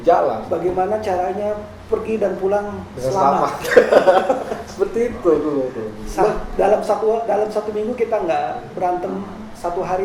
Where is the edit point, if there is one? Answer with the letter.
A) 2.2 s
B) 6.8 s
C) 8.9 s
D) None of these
D